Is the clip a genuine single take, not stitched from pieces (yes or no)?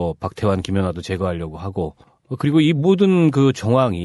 yes